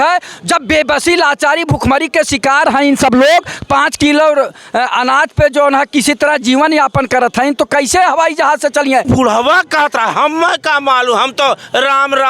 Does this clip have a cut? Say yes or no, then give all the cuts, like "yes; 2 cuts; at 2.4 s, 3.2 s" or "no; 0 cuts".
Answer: yes; 1 cut; at 9.0 s